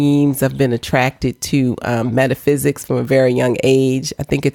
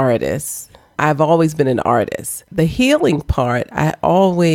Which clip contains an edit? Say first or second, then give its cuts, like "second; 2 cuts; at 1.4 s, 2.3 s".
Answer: second; 2 cuts; at 0.9 s, 2.4 s